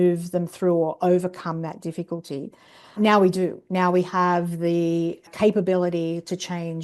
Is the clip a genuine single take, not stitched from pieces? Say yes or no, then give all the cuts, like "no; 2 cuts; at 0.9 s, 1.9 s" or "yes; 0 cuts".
no; 2 cuts; at 3.0 s, 5.2 s